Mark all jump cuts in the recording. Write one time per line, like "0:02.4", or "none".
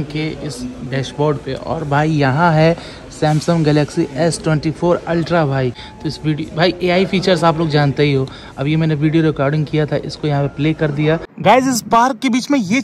0:05.9
0:11.3